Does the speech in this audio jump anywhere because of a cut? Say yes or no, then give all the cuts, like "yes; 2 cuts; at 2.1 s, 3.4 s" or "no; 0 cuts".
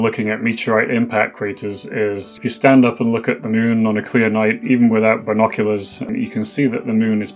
yes; 2 cuts; at 2.3 s, 6.1 s